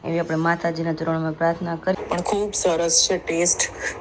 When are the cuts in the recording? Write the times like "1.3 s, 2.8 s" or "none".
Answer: 2.0 s

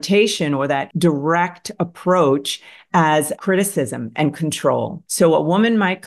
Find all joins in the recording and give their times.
0.9 s, 5.0 s

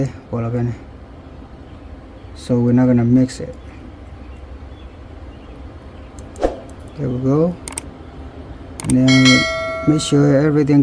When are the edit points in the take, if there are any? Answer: none

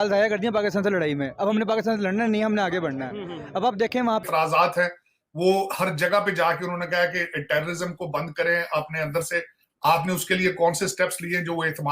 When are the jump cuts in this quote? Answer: 4.2 s

